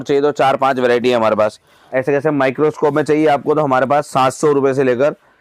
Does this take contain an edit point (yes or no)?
yes